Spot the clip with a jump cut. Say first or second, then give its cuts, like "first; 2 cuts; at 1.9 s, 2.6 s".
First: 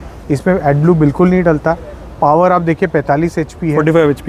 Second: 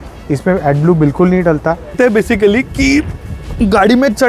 second; 1 cut; at 1.9 s